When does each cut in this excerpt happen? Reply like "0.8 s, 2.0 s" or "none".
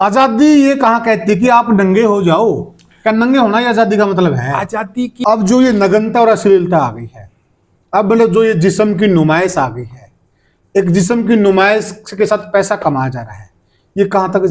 5.1 s